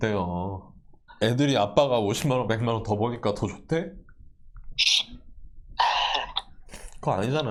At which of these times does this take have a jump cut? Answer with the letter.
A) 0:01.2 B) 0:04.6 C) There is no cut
C